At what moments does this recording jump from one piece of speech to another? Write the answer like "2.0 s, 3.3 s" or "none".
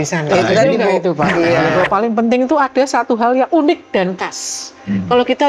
1.7 s